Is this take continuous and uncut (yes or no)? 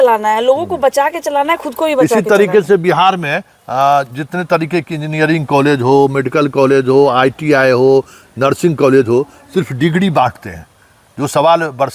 yes